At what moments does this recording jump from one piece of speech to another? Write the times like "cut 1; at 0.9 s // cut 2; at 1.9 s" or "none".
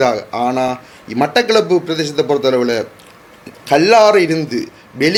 none